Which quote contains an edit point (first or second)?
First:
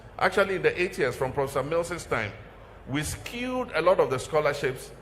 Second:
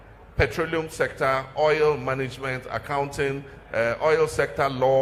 first